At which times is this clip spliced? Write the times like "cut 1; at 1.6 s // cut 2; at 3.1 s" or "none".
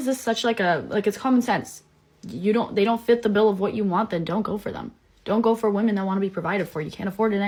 none